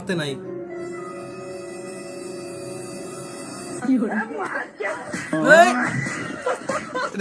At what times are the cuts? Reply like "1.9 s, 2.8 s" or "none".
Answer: none